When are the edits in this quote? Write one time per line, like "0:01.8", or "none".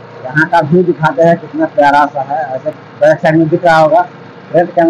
none